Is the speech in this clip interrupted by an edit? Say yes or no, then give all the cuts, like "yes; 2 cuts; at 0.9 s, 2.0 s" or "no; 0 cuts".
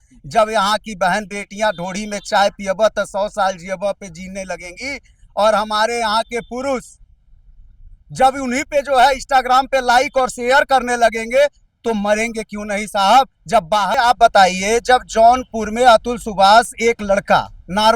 yes; 1 cut; at 13.9 s